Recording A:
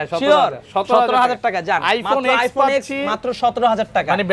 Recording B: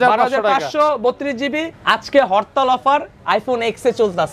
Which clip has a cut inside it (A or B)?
B